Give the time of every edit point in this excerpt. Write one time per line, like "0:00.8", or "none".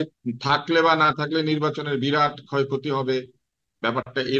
none